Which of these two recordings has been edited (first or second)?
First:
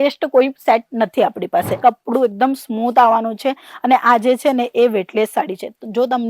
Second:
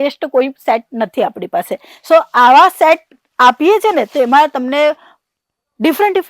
first